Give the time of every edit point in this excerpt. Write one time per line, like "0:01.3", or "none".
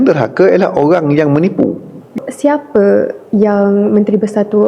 0:02.1

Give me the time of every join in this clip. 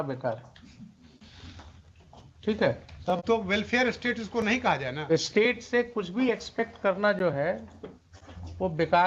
none

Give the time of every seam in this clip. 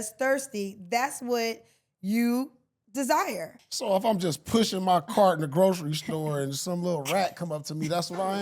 0:03.6

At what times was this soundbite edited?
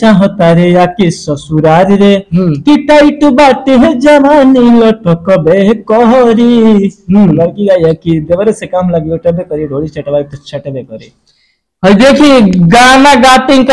none

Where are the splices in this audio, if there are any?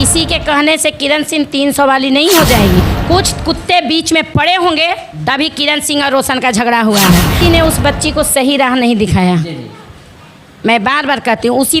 0:02.8
0:07.3

